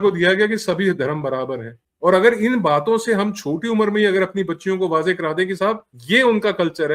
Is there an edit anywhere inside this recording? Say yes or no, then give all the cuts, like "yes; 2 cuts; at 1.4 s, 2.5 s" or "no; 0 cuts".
no; 0 cuts